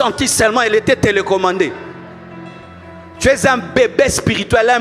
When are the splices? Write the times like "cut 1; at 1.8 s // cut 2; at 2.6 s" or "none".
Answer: none